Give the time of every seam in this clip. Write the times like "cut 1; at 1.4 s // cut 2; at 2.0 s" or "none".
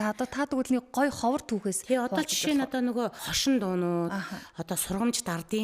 cut 1; at 3.3 s

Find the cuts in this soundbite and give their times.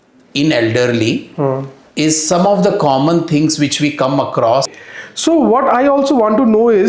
cut 1; at 4.8 s

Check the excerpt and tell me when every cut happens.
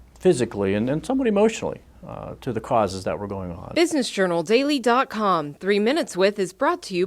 cut 1; at 3.6 s

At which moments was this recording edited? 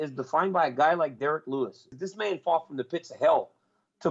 cut 1; at 1.9 s

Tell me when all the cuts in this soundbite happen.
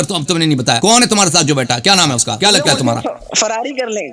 cut 1; at 0.8 s // cut 2; at 2.3 s

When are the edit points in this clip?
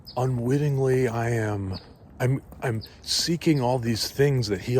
cut 1; at 2.0 s

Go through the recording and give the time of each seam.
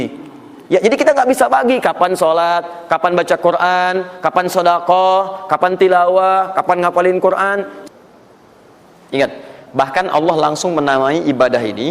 cut 1; at 7.7 s

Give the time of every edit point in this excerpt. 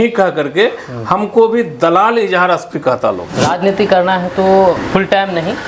cut 1; at 3.3 s

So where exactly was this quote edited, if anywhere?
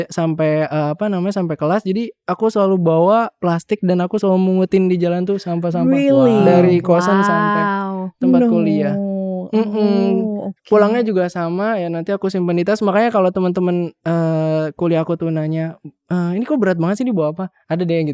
none

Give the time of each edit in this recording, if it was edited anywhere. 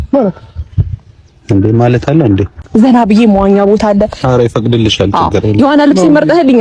cut 1; at 2.6 s

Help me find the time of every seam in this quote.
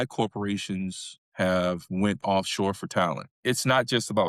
cut 1; at 3.4 s

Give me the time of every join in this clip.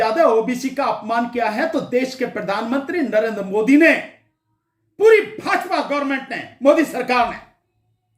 none

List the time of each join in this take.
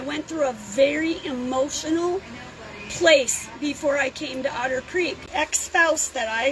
none

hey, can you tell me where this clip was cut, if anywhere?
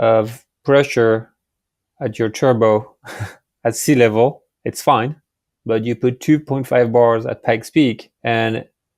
none

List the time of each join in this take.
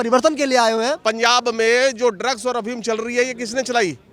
cut 1; at 1.0 s

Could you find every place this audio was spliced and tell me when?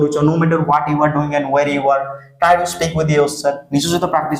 none

